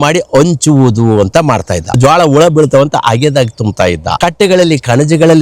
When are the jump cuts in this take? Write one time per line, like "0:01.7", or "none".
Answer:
0:02.0
0:04.2